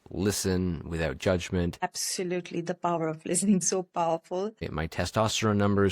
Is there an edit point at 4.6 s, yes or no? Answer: yes